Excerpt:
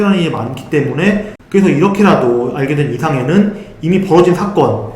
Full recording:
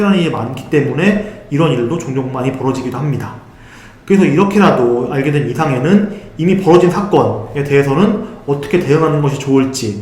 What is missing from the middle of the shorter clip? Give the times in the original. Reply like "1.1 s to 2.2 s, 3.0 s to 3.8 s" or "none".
1.4 s to 3.9 s